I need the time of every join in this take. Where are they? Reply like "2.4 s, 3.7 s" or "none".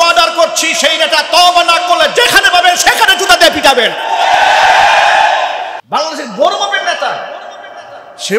5.8 s